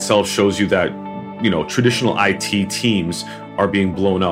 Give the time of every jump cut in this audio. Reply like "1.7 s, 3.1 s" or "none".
none

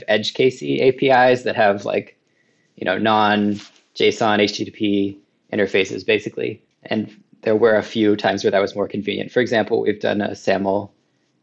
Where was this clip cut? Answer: none

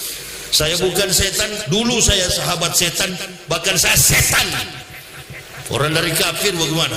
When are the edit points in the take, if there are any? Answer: none

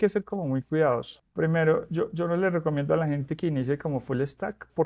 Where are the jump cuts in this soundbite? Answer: 1.2 s

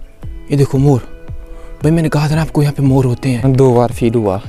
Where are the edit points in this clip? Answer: 3.4 s

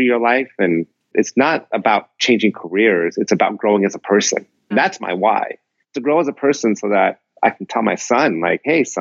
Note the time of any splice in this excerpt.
1.1 s, 4.7 s

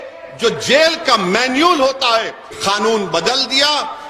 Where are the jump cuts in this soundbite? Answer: 2.5 s

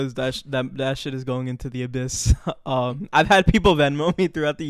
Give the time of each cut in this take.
none

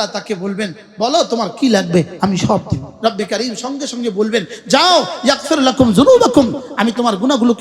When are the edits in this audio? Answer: 2.9 s

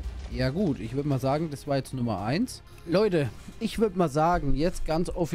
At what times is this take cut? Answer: 2.7 s

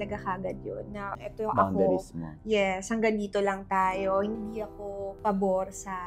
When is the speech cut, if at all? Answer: none

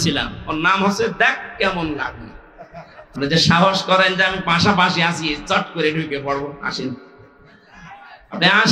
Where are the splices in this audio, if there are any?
3.2 s

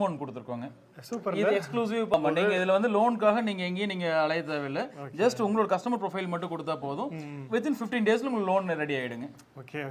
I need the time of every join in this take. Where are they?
2.1 s

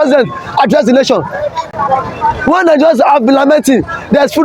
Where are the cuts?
none

